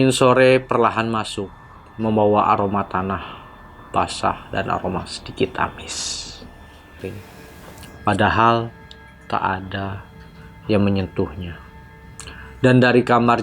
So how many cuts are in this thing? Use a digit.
1